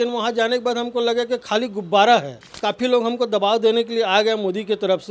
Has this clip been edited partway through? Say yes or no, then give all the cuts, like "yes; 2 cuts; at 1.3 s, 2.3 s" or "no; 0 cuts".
yes; 1 cut; at 2.4 s